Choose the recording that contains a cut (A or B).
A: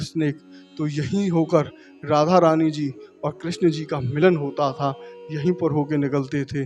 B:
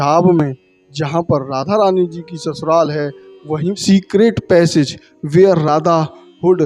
B